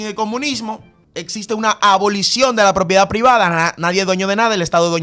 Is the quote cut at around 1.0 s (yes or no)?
yes